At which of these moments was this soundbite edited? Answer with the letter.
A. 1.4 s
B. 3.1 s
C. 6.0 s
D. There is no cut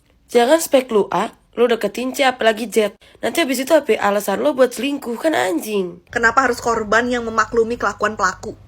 C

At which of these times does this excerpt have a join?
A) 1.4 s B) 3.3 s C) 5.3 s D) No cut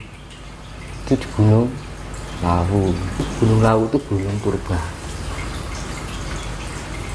B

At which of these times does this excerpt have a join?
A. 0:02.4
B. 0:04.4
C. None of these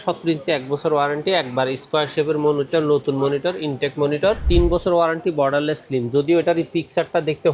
B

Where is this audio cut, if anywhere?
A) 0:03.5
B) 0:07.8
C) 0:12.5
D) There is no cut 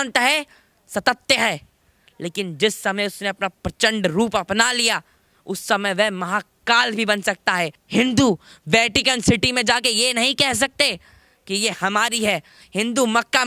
B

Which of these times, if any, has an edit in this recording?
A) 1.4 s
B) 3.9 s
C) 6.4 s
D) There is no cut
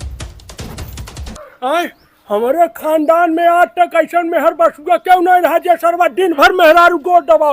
A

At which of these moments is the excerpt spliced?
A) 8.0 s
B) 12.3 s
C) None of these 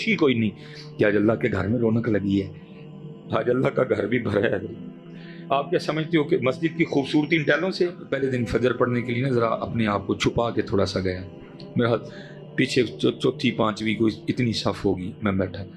A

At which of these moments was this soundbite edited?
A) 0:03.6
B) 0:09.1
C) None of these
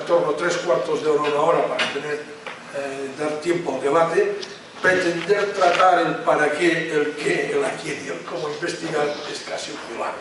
A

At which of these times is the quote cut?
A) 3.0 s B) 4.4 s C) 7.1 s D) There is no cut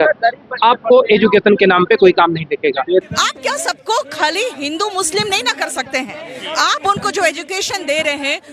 A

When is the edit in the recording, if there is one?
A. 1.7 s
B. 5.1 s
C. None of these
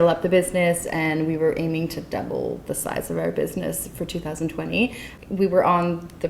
B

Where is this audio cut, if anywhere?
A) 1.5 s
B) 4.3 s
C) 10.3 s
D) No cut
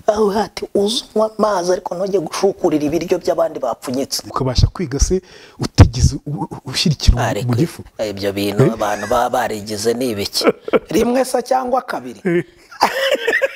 B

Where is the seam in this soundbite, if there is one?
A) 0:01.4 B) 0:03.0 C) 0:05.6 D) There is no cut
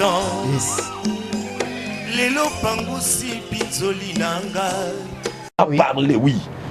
C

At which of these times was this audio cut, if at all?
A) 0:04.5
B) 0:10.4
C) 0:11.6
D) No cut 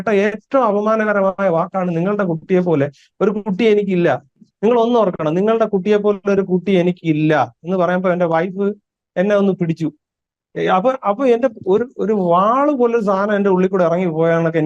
A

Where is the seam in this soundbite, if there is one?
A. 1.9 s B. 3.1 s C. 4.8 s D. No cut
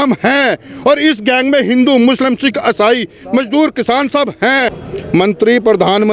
C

